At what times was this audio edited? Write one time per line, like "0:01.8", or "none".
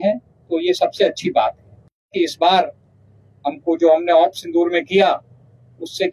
0:02.1